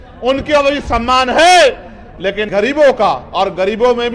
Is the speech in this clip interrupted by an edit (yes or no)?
yes